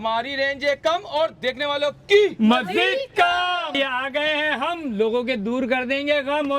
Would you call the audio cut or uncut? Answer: cut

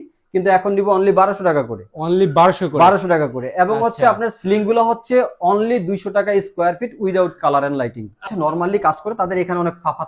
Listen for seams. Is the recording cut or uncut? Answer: cut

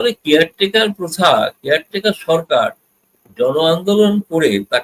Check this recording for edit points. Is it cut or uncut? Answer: uncut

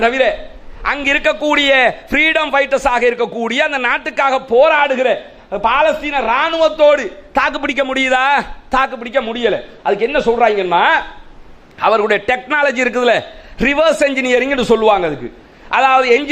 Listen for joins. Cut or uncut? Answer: uncut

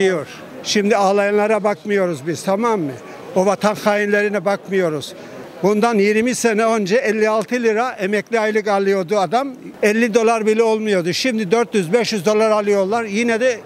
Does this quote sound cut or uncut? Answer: uncut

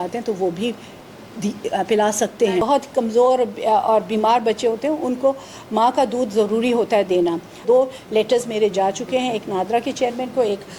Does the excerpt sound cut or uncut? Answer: cut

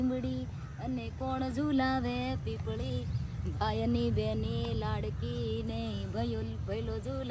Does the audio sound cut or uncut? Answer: uncut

